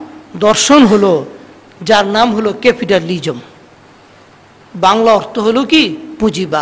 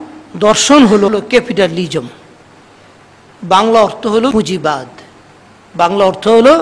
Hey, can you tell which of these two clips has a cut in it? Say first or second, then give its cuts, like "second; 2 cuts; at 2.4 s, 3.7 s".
second; 2 cuts; at 1.1 s, 4.3 s